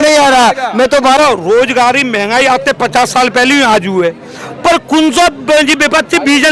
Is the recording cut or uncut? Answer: cut